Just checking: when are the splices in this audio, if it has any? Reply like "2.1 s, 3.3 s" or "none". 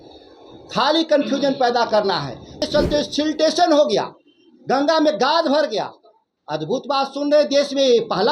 2.6 s